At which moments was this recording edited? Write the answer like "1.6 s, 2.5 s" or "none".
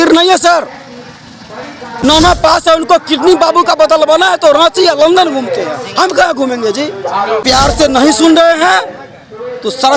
2.0 s, 7.4 s